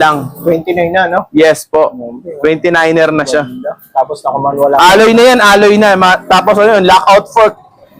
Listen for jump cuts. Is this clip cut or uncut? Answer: uncut